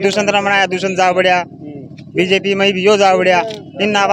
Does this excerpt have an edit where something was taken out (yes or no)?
no